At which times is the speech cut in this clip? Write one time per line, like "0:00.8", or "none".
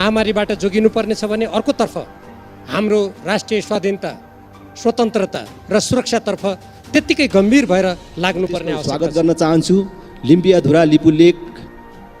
0:08.9